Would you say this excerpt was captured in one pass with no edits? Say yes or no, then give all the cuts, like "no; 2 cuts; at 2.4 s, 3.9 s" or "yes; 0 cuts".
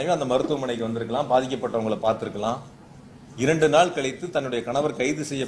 yes; 0 cuts